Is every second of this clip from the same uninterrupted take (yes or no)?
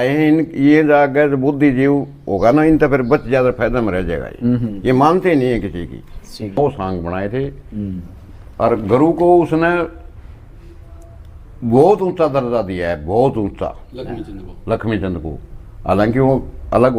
no